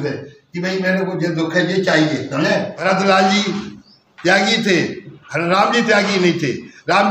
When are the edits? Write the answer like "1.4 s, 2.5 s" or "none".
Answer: 2.7 s